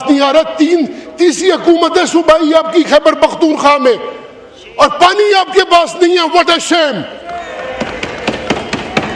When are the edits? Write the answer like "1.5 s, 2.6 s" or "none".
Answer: none